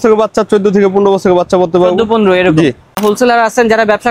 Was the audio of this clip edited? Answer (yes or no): yes